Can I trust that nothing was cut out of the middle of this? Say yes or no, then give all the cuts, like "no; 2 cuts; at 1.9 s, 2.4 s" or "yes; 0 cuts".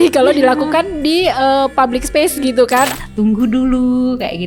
no; 1 cut; at 2.9 s